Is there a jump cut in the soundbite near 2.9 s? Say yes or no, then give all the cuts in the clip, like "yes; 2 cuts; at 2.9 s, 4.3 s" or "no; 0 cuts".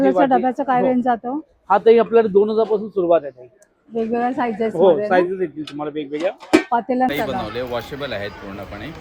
no; 1 cut; at 7.1 s